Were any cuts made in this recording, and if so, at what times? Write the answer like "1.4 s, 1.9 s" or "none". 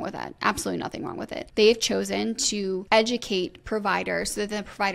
1.4 s, 2.8 s